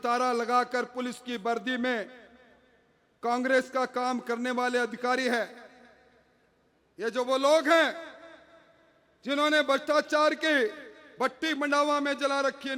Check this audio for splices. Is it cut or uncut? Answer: uncut